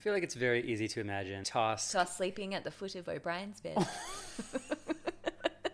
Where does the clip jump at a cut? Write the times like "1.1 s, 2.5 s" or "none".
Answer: 1.4 s